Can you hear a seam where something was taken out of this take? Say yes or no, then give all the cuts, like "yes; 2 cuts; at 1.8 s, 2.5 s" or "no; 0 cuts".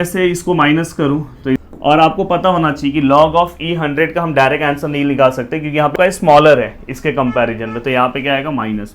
yes; 2 cuts; at 1.6 s, 5.9 s